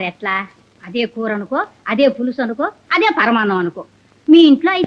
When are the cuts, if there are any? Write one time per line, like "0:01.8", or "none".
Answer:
none